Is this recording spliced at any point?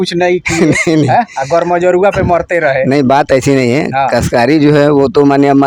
no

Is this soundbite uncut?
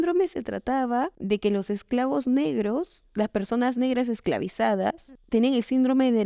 no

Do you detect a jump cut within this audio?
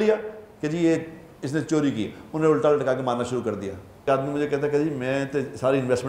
yes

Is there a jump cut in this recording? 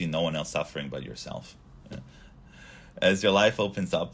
no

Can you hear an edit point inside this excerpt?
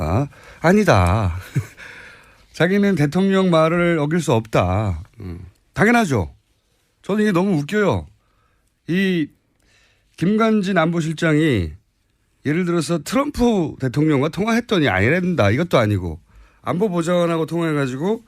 yes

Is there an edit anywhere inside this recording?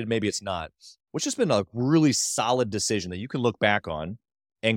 no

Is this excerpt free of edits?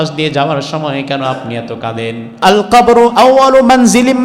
no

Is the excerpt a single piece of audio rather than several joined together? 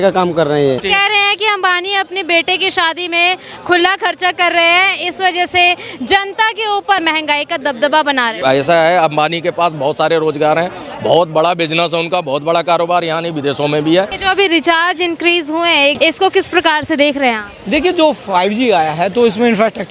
no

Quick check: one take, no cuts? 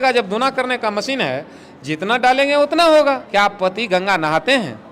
no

